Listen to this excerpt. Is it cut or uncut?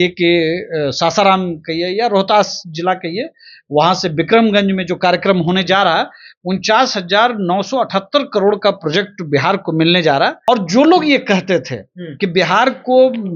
cut